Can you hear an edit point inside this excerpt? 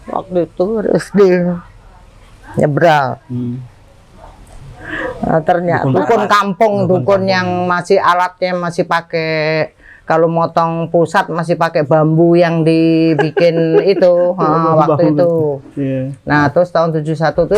yes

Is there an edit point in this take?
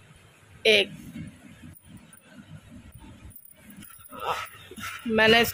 no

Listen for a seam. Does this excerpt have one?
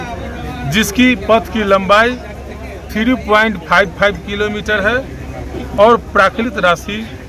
no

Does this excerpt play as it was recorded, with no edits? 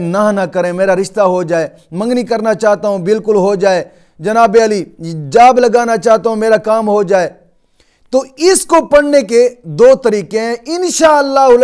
yes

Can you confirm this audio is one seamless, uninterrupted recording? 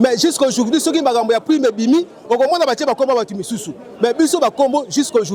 yes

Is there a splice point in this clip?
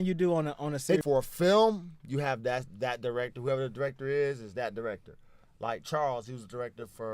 yes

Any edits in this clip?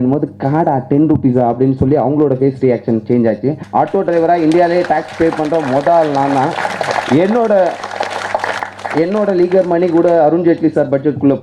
yes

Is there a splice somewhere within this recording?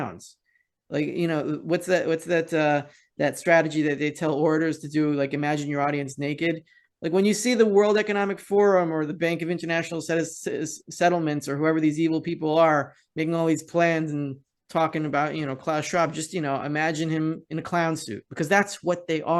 no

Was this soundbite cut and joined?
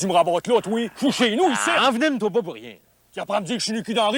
no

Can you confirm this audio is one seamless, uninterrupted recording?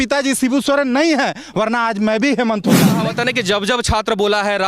no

